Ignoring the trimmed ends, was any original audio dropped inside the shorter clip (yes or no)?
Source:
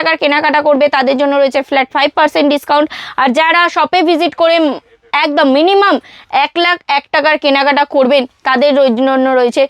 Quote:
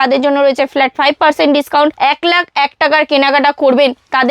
yes